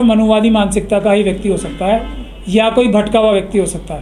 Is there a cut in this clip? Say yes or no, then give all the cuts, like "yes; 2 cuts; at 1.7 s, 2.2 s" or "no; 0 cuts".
no; 0 cuts